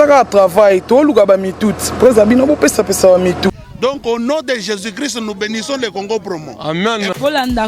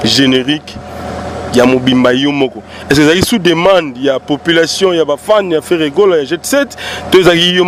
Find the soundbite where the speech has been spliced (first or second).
first